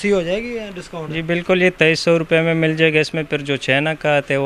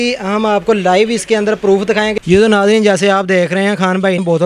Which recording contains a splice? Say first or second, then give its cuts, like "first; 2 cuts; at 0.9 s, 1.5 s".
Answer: second; 1 cut; at 2.1 s